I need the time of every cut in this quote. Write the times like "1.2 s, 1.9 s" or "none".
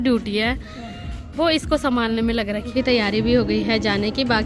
2.7 s